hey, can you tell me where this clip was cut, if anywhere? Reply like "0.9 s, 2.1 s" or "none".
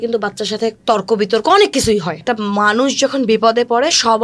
2.3 s

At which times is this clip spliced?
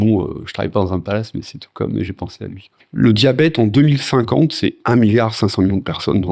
2.8 s, 4.8 s

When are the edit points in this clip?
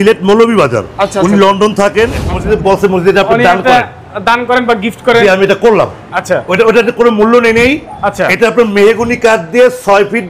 2.3 s

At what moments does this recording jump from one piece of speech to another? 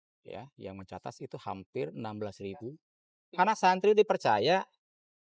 3.4 s

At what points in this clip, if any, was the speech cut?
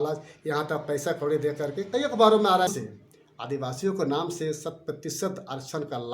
2.7 s

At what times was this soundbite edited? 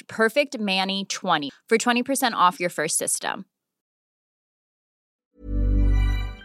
1.5 s

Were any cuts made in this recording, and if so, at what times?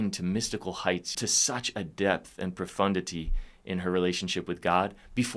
1.1 s

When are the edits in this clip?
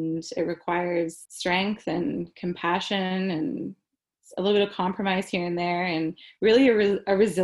1.3 s

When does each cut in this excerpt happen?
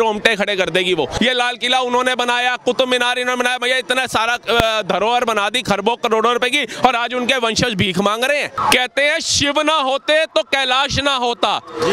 1.1 s, 8.5 s

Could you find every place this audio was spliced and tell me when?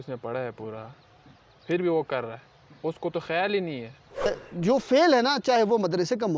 4.3 s

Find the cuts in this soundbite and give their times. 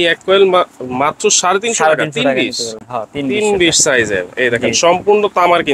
none

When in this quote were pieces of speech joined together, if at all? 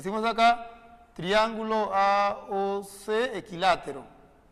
3.6 s

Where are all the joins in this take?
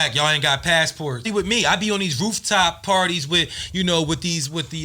1.3 s

